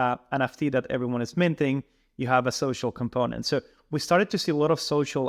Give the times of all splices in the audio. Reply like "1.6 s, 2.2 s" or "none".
none